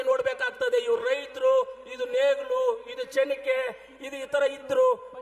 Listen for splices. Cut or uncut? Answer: uncut